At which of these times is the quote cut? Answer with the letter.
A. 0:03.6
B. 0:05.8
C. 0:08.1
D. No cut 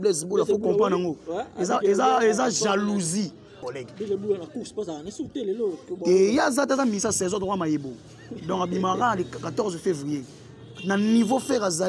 A